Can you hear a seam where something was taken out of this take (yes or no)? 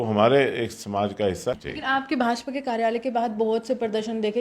yes